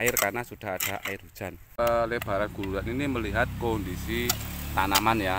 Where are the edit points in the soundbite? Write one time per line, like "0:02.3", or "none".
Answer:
0:01.8